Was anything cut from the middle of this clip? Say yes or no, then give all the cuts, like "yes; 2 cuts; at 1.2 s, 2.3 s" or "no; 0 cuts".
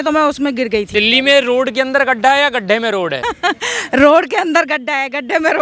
yes; 2 cuts; at 0.9 s, 3.2 s